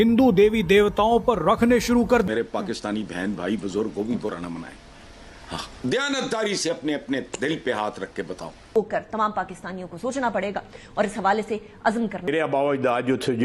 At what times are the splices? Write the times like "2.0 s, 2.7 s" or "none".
2.3 s, 8.8 s, 12.3 s